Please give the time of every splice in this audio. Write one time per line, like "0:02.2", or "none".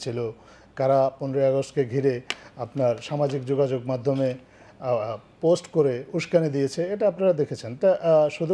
none